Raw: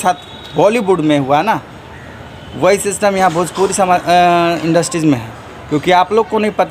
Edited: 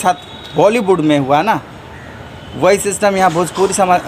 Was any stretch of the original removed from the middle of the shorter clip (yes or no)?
no